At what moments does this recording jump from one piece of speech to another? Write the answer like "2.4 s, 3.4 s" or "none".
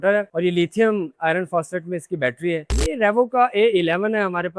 2.7 s

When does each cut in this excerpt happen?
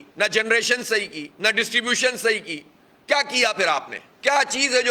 none

